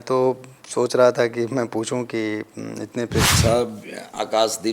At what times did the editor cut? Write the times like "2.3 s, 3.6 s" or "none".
3.3 s